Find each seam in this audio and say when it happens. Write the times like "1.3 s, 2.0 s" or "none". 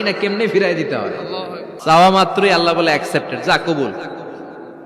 1.7 s

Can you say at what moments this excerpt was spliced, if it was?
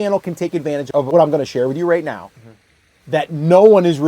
0.9 s

